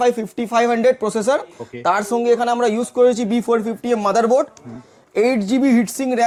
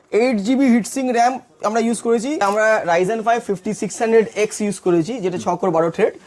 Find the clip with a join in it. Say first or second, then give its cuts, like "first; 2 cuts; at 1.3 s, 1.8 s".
second; 1 cut; at 2.4 s